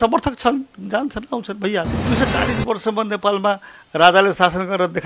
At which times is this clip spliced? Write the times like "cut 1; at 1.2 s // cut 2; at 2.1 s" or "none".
cut 1; at 1.9 s